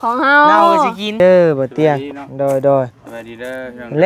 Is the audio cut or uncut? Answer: cut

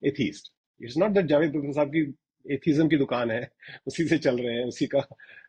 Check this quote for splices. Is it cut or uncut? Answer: uncut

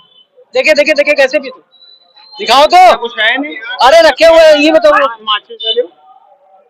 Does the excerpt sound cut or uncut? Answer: uncut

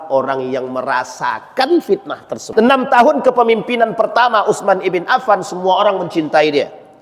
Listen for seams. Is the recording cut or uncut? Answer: cut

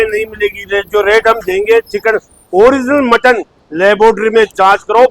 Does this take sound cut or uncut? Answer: uncut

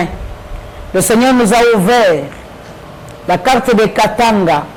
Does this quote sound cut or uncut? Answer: uncut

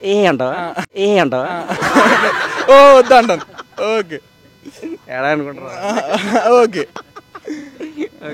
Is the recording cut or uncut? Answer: uncut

